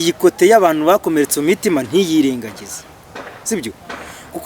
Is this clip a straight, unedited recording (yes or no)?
yes